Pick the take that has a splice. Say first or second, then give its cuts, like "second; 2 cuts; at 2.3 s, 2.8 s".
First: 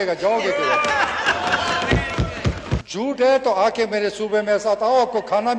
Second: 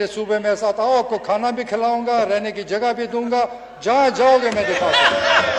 first; 1 cut; at 2.9 s